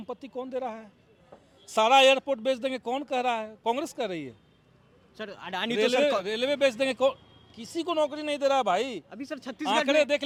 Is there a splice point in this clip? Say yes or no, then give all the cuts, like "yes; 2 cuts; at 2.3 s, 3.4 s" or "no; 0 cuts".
no; 0 cuts